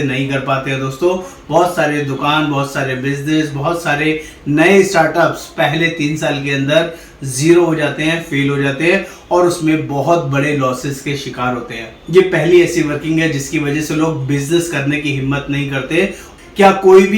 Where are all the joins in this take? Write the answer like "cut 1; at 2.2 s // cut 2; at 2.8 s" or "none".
cut 1; at 16.3 s